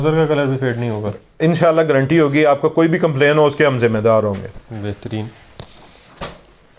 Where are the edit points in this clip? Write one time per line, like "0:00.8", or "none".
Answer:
none